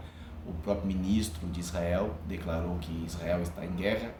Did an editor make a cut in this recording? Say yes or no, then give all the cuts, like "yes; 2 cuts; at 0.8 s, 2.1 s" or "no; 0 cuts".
no; 0 cuts